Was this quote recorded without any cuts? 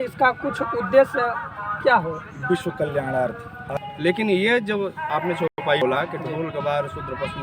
no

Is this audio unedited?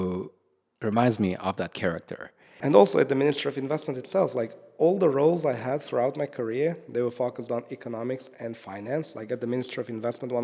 no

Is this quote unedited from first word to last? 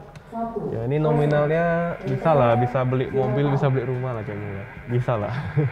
yes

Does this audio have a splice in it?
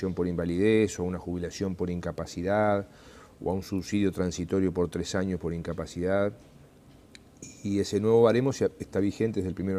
no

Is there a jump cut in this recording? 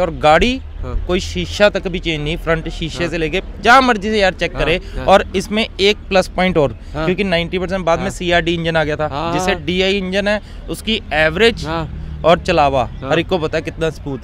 no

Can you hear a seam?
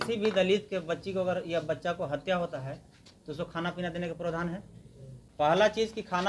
no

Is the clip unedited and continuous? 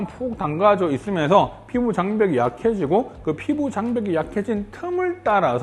yes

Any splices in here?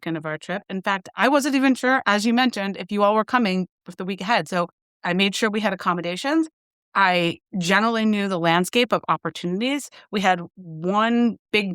yes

